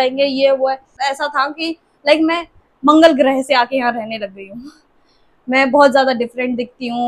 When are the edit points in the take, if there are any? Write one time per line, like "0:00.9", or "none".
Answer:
0:01.0